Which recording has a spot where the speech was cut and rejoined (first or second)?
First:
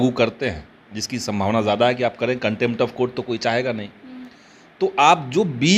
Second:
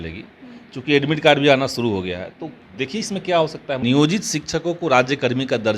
second